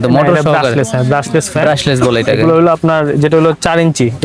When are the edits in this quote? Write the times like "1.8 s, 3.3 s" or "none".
none